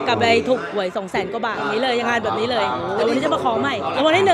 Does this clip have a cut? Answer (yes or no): no